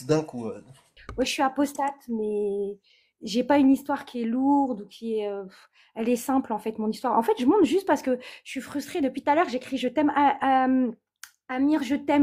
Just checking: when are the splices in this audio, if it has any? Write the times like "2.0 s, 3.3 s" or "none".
1.0 s